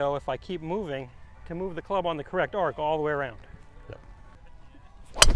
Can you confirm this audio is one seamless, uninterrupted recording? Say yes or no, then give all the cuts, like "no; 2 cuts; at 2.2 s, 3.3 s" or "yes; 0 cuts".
no; 1 cut; at 4.2 s